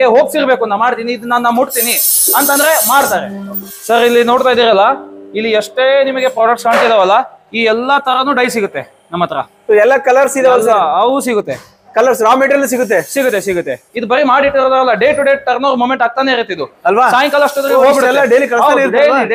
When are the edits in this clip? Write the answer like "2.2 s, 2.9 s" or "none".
3.7 s, 13.8 s